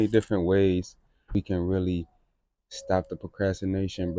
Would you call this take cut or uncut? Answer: cut